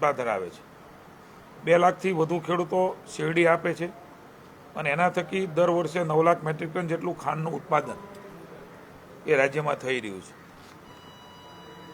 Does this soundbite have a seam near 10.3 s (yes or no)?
no